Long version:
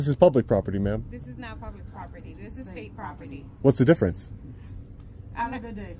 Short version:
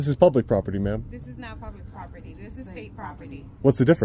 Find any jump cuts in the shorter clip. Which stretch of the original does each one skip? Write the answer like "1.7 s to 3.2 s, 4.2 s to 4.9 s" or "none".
none

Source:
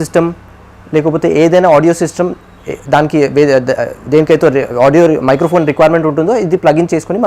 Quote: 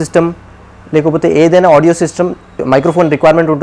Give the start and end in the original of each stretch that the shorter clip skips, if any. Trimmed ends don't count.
2.6 s to 5.2 s

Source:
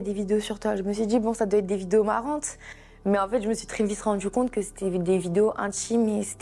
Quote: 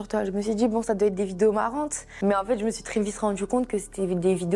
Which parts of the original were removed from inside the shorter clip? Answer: 2.5 s to 2.9 s

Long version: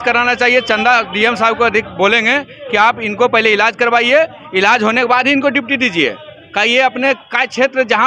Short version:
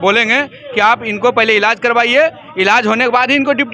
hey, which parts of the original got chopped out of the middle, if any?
none

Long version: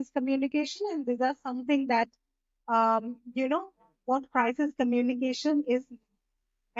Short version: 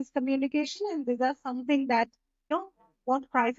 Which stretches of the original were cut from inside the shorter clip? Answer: 2.5 s to 3.5 s

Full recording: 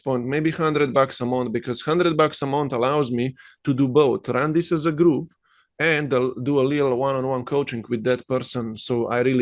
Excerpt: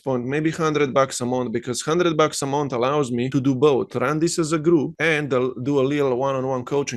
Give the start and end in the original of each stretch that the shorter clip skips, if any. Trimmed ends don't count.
3.3 s to 3.6 s, 5.3 s to 5.7 s

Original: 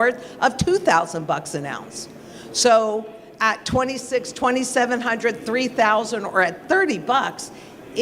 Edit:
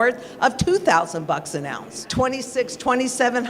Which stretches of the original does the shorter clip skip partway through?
2.1 s to 3.6 s

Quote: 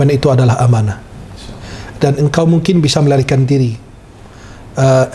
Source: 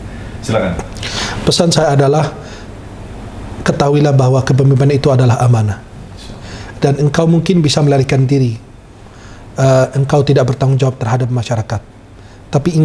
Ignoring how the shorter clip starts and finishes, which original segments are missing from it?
none

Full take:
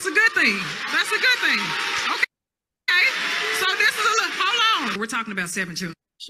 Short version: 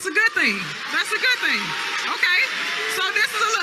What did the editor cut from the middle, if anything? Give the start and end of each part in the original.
2.2 s to 2.9 s

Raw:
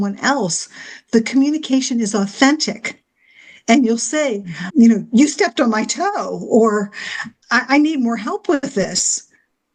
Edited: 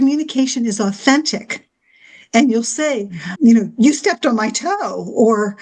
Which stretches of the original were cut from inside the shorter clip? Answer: none

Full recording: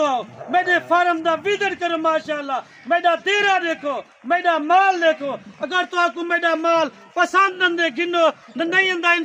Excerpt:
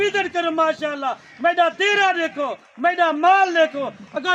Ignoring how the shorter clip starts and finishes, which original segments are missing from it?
none

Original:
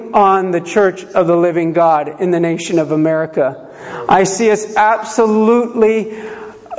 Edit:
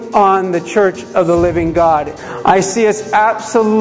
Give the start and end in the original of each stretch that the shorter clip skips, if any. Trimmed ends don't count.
2.1 s to 3.8 s

